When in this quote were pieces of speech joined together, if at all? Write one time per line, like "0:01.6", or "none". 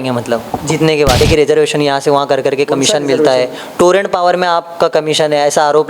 0:01.2